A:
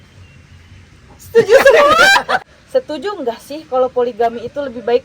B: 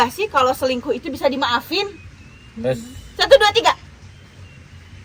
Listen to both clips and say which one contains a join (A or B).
A